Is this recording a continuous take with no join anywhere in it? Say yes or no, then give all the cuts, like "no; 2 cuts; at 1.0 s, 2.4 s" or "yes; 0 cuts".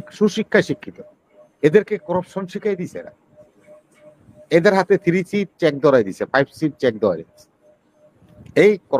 yes; 0 cuts